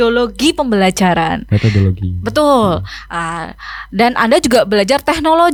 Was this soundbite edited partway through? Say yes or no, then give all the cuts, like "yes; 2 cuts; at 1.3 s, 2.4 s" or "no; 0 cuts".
no; 0 cuts